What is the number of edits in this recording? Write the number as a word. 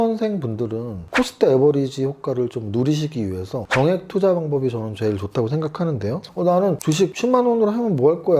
zero